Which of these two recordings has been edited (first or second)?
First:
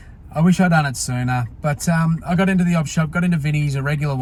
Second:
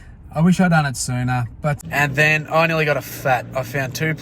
second